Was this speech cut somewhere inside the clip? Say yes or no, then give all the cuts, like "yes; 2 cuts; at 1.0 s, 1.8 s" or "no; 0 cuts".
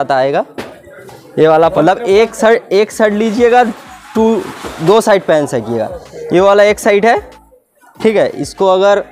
yes; 1 cut; at 1.7 s